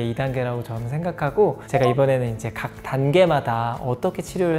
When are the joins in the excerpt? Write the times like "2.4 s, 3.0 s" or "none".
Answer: none